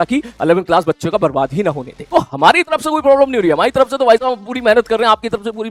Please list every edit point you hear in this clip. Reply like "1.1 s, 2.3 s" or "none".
none